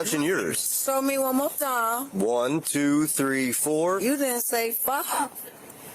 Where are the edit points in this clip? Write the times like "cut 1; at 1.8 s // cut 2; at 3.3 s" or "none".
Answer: none